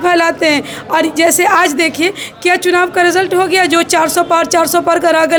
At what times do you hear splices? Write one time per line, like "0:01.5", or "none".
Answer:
none